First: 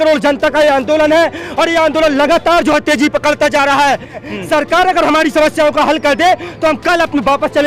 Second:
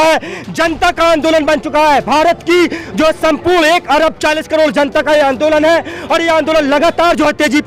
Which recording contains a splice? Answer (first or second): first